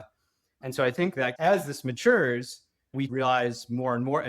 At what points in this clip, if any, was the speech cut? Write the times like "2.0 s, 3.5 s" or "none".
1.4 s